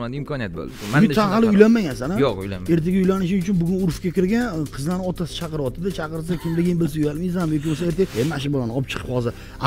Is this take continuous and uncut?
no; 2 cuts; at 0.8 s, 8.1 s

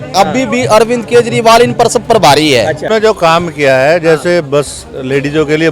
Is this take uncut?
no; 1 cut; at 2.9 s

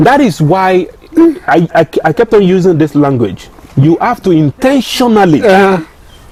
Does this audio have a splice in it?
no; 0 cuts

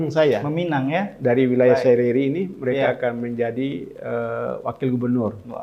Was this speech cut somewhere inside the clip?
no; 0 cuts

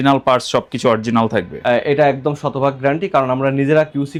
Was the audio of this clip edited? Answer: no; 0 cuts

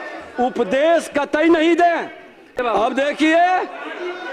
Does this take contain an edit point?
yes; 1 cut; at 2.6 s

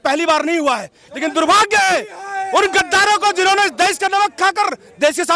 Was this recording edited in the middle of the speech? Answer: yes; 1 cut; at 1.0 s

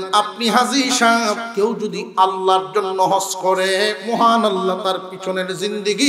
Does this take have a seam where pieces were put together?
yes; 2 cuts; at 1.5 s, 4.0 s

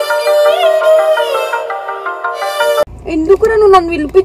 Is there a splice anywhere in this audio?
yes; 1 cut; at 2.8 s

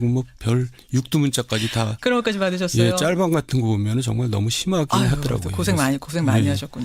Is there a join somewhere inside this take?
yes; 1 cut; at 4.6 s

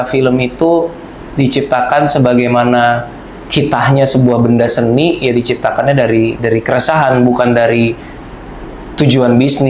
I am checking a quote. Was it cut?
no; 0 cuts

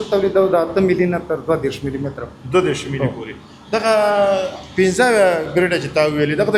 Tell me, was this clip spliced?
no; 0 cuts

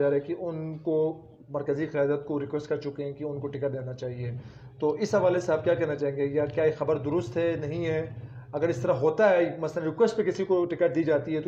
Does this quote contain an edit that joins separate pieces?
no; 0 cuts

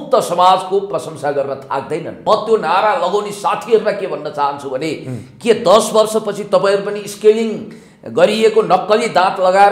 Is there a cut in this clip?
yes; 1 cut; at 2.1 s

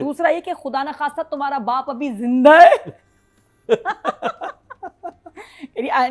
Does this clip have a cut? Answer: no; 0 cuts

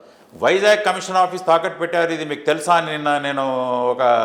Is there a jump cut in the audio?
no; 0 cuts

